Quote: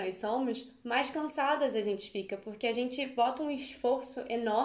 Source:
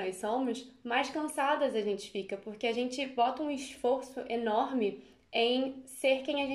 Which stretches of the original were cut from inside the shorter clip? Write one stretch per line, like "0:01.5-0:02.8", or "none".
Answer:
none